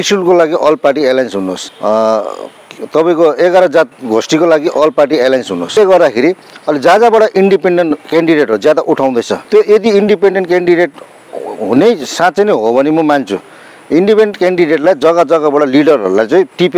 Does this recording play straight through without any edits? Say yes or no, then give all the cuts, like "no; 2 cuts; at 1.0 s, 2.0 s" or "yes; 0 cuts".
no; 3 cuts; at 1.7 s, 5.8 s, 9.4 s